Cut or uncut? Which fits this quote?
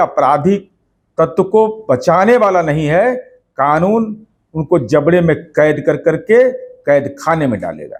uncut